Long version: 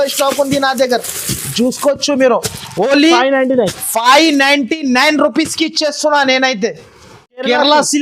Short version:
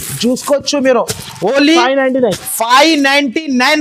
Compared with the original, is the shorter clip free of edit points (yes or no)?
yes